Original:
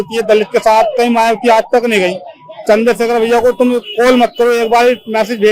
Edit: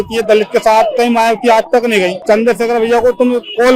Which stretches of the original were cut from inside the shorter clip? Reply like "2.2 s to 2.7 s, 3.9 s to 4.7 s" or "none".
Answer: 2.2 s to 2.6 s